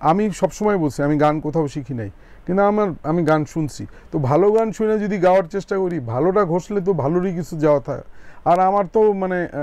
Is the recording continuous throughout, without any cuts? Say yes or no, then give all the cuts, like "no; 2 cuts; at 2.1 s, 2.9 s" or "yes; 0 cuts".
yes; 0 cuts